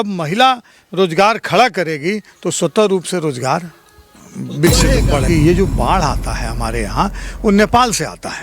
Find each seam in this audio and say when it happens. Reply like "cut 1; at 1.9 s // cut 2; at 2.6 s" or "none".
cut 1; at 5.3 s